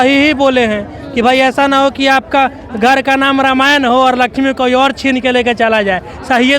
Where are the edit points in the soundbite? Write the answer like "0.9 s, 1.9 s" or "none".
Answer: none